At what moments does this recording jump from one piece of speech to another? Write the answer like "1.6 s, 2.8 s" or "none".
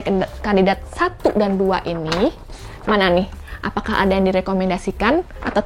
none